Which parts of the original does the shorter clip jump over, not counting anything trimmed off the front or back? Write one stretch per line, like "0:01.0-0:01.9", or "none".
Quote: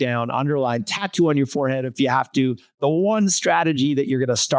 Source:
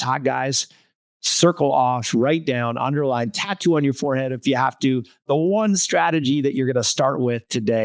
none